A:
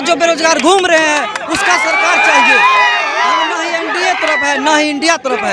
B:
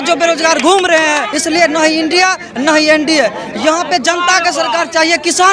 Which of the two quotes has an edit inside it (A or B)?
B